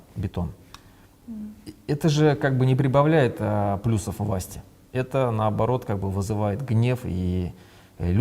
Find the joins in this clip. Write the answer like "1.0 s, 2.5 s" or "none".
none